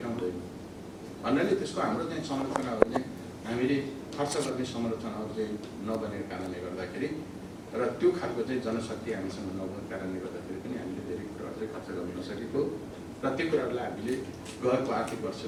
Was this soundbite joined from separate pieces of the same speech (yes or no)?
no